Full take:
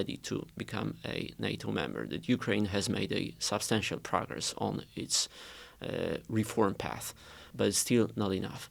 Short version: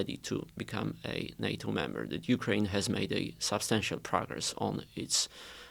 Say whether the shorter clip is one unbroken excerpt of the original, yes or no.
yes